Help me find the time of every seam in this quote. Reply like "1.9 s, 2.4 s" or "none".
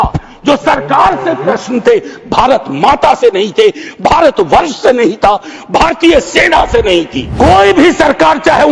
7.2 s